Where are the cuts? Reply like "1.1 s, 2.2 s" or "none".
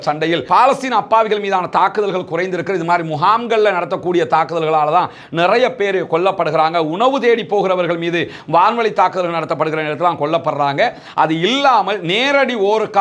none

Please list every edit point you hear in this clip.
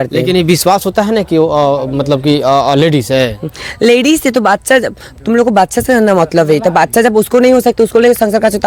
none

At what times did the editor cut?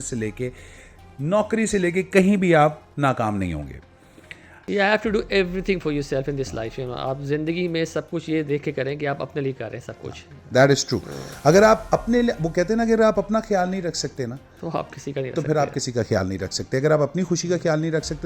4.6 s

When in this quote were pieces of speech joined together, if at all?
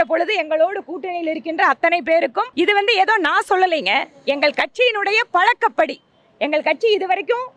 2.4 s

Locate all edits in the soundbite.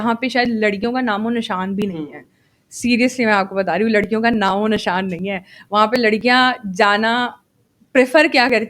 none

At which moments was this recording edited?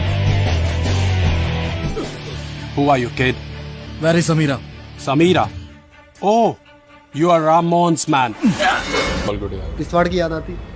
9.3 s

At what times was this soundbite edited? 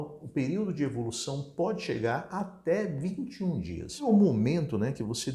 4.1 s

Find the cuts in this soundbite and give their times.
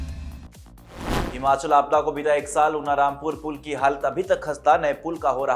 1.0 s

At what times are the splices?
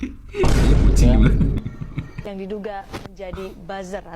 2.1 s

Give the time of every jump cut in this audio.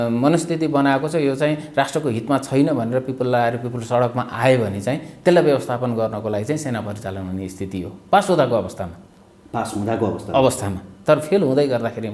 none

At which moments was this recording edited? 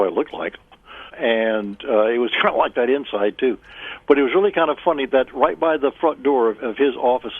none

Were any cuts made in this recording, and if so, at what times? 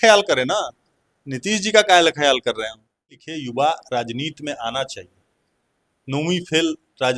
3.3 s

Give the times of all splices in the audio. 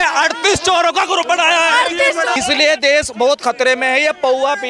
2.3 s

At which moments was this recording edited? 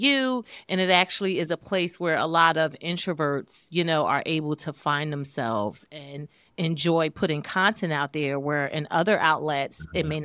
none

